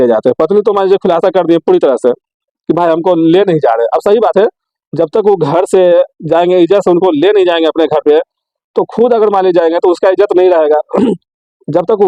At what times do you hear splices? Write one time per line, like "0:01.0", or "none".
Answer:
none